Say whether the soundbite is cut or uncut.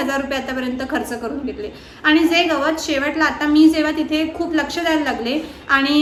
uncut